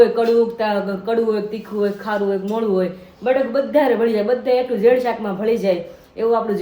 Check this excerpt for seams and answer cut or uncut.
uncut